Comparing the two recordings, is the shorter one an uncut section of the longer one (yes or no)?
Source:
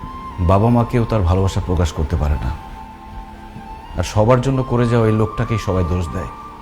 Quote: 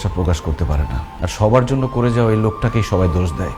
no